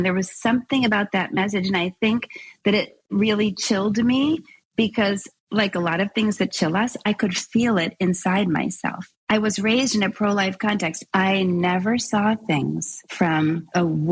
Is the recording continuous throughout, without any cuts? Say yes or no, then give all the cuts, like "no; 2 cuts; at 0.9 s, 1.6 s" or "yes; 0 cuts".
yes; 0 cuts